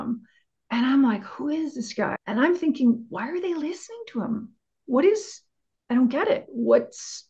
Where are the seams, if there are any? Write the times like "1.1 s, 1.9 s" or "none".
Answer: 2.2 s

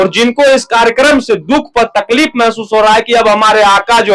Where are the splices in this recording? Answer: none

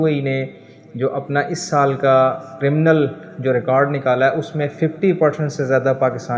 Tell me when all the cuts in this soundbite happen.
2.5 s

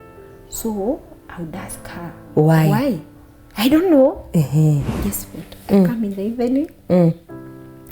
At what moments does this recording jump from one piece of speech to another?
4.9 s

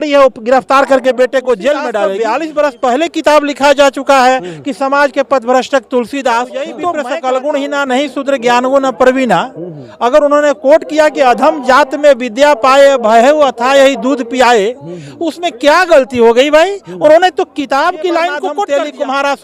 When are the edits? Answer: 2.1 s, 6.8 s, 18.7 s

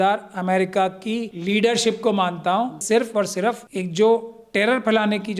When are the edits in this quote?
1.3 s, 2.8 s, 3.7 s

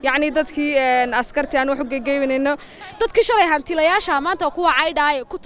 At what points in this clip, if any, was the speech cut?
2.8 s

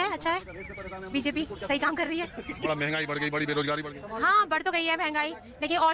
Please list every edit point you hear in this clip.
2.7 s

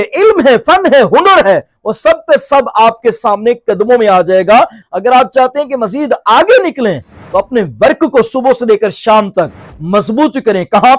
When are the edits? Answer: 4.8 s

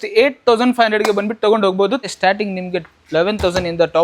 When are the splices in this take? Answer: 2.1 s

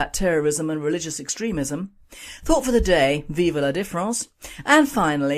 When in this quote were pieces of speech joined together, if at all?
none

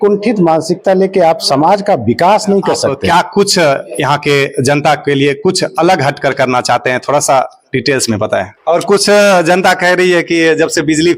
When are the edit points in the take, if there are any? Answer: 2.9 s, 8.5 s

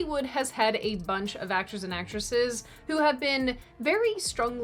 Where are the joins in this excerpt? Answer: none

